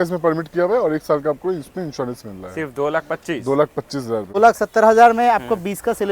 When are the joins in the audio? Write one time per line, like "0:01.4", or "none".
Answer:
0:04.4